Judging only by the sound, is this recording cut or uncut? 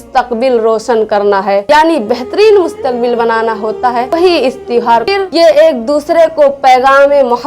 cut